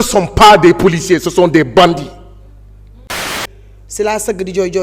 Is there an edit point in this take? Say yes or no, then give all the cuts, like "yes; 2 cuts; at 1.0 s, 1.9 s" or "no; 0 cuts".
yes; 1 cut; at 3.2 s